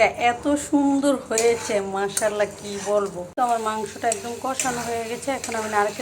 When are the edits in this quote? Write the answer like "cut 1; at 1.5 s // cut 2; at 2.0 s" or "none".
cut 1; at 3.2 s

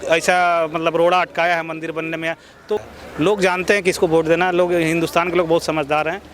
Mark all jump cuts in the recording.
cut 1; at 2.8 s

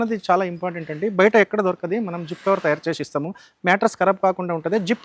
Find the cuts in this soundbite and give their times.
none

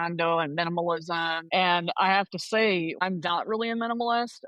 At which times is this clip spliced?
cut 1; at 1.4 s // cut 2; at 3.0 s

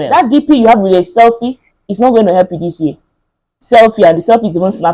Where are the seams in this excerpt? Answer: none

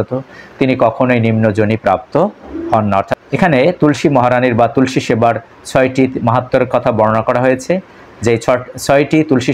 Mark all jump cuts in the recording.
cut 1; at 3.2 s

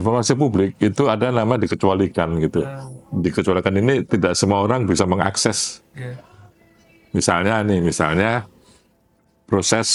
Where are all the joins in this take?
none

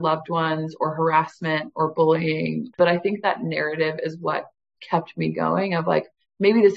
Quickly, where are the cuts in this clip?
cut 1; at 2.7 s

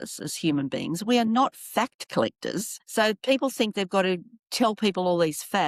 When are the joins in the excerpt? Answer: none

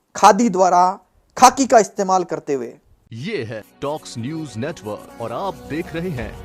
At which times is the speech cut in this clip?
cut 1; at 3.1 s

